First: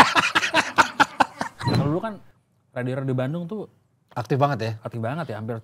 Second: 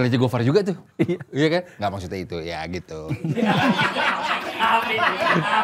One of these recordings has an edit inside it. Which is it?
first; 1 cut; at 1.7 s

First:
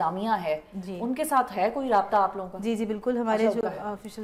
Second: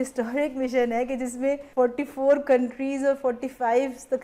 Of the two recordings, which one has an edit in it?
second; 1 cut; at 1.6 s

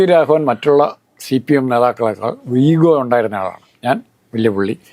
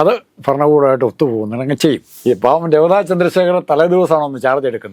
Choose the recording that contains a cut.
second; 1 cut; at 2.1 s

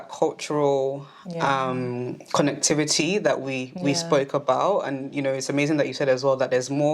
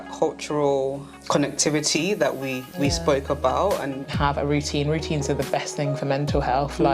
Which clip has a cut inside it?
second; 2 cuts; at 1.1 s, 4.1 s

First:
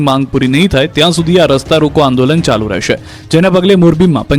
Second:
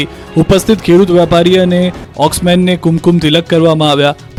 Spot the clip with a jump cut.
first; 1 cut; at 2.8 s

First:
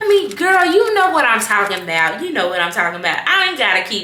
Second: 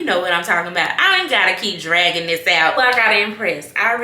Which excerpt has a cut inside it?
second; 1 cut; at 2.7 s

